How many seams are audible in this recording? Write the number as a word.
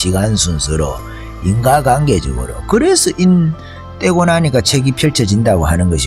zero